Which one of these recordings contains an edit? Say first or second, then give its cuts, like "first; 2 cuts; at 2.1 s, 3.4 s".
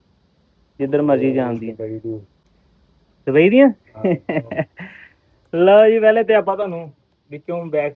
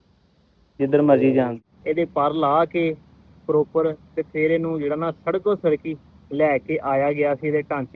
second; 1 cut; at 1.6 s